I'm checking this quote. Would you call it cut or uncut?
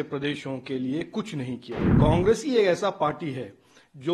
cut